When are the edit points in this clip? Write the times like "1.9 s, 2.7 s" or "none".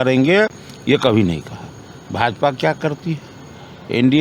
none